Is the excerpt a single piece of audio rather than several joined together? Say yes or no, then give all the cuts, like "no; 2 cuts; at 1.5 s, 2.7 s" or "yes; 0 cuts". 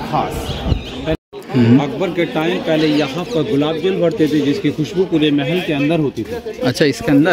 no; 1 cut; at 1.1 s